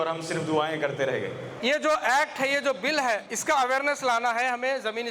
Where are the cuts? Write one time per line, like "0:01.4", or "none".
0:01.5
0:03.3